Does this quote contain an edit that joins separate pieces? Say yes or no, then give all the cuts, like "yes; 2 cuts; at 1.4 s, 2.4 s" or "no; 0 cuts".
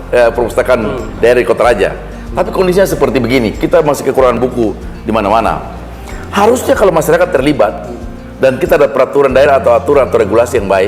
no; 0 cuts